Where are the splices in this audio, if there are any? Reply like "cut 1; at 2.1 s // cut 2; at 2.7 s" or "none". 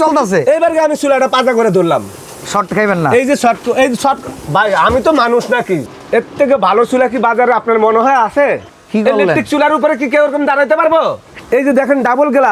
cut 1; at 5.9 s // cut 2; at 8.7 s // cut 3; at 11.3 s

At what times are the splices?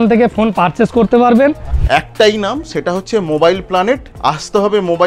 cut 1; at 1.7 s // cut 2; at 4.1 s

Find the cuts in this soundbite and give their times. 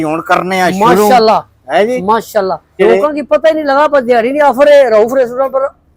cut 1; at 2.8 s

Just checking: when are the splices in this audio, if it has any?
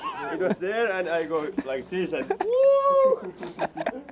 none

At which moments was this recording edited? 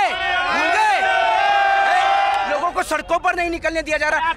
cut 1; at 2.5 s

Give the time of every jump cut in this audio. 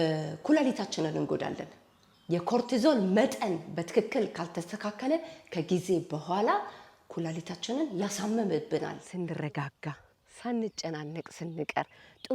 cut 1; at 9.0 s

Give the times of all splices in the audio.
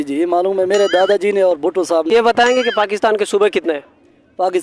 cut 1; at 2.1 s

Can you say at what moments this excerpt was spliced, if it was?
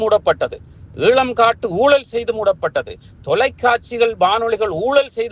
none

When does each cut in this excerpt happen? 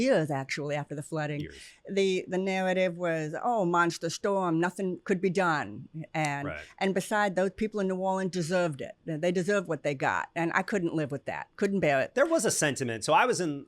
none

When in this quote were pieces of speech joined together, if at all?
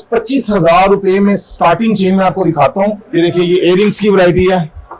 cut 1; at 3.0 s

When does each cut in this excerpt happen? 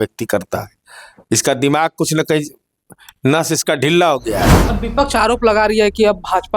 cut 1; at 4.6 s

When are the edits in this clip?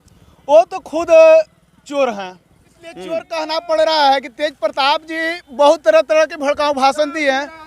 cut 1; at 3.3 s

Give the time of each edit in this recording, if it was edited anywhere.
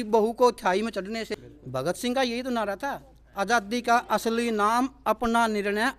cut 1; at 1.3 s

